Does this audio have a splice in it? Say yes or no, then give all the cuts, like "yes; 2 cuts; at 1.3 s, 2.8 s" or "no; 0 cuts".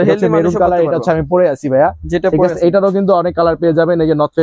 no; 0 cuts